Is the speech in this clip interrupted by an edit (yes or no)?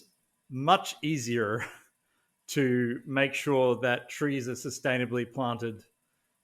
no